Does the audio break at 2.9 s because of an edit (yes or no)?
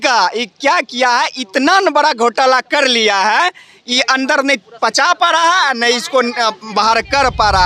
no